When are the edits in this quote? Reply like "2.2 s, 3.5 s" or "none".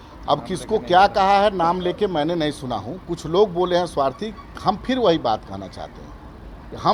none